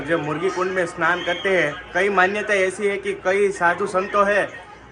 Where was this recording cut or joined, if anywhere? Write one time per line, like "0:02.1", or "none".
none